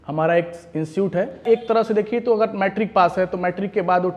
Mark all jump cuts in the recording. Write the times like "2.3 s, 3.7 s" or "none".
1.4 s